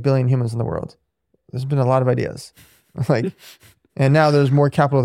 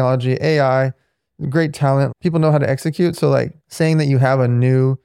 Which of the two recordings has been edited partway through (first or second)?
second